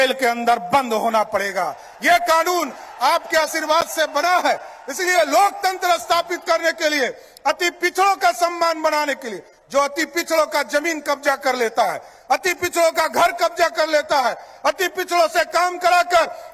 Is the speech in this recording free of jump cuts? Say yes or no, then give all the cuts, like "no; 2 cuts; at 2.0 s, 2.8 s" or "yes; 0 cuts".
yes; 0 cuts